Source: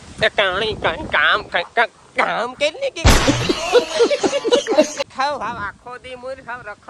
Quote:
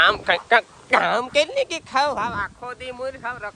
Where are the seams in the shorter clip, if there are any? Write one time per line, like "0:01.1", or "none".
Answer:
0:01.7